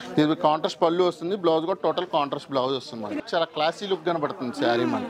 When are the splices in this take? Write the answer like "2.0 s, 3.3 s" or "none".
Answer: 3.2 s

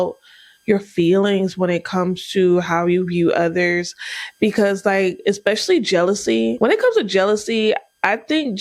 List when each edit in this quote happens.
6.6 s

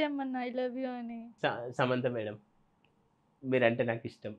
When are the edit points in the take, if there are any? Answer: 1.2 s

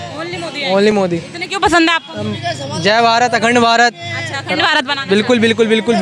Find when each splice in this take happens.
none

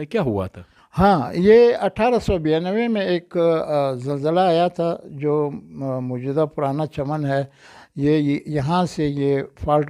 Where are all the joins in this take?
none

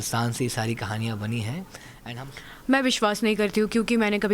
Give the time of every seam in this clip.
1.9 s

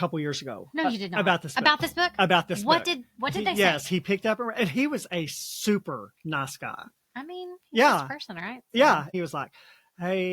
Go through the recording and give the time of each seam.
9.0 s

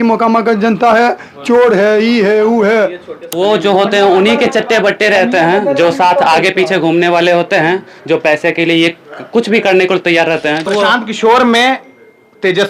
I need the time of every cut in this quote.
3.3 s, 10.7 s

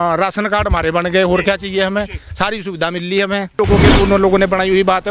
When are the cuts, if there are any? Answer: 3.5 s

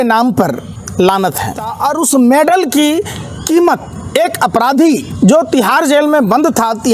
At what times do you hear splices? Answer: 1.7 s, 5.1 s

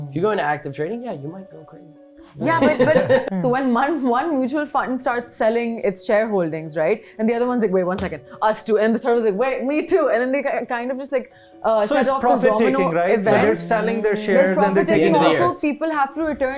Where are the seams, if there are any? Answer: 3.2 s

